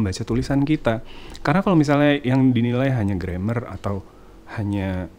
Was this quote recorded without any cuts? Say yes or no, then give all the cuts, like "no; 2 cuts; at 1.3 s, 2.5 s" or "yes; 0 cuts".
yes; 0 cuts